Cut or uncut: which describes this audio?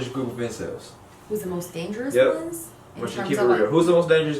uncut